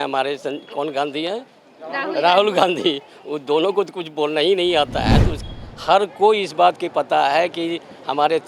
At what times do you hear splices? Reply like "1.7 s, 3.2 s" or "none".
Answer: 5.4 s